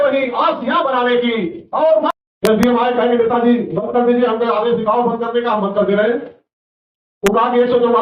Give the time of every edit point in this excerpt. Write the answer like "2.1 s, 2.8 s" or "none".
2.1 s